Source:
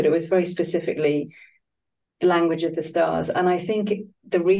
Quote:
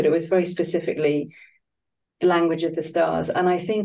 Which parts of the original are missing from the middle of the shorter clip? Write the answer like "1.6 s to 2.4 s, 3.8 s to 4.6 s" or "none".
none